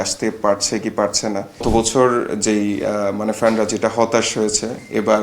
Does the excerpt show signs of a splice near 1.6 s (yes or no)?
yes